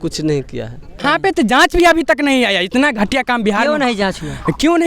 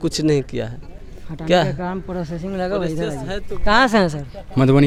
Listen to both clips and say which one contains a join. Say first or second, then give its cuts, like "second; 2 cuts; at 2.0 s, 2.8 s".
first; 1 cut; at 1.0 s